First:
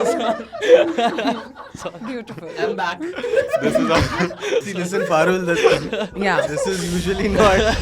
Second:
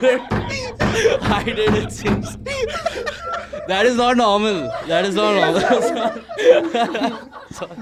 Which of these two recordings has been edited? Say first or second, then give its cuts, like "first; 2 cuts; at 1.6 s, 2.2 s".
first; 1 cut; at 4.7 s